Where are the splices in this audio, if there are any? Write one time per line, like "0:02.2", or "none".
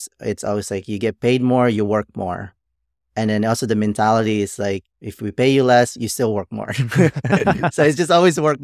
0:05.0